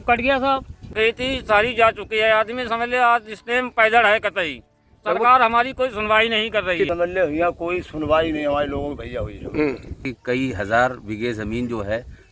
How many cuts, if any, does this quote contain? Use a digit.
3